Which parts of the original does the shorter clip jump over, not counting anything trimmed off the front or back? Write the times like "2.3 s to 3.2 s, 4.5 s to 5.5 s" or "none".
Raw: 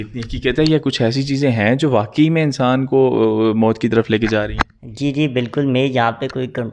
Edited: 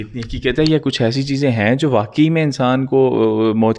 none